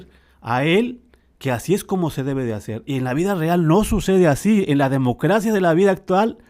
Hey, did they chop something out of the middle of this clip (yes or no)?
no